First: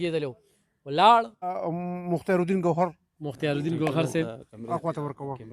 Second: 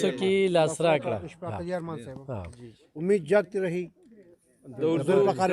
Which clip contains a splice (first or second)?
first